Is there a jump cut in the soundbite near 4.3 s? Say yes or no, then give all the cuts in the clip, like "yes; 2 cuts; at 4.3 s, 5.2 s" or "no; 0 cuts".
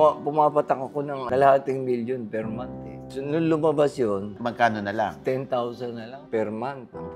yes; 4 cuts; at 1.2 s, 3.0 s, 4.3 s, 6.1 s